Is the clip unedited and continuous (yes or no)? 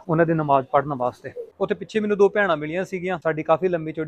no